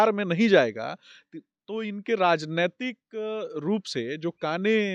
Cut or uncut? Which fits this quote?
uncut